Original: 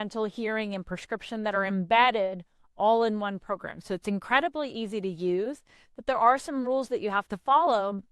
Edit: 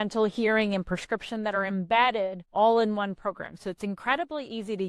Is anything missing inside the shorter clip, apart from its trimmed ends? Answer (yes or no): yes